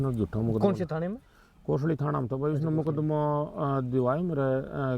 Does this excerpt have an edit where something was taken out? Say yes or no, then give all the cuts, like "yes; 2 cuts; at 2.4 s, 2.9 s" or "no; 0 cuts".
no; 0 cuts